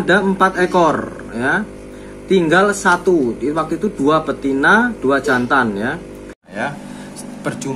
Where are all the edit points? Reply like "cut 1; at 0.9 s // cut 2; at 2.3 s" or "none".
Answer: cut 1; at 6.4 s